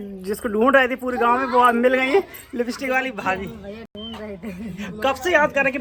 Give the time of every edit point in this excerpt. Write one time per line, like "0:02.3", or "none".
none